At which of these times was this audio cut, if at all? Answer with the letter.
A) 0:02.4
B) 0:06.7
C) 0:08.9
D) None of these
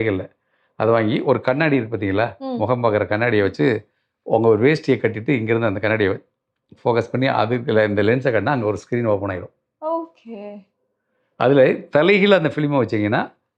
D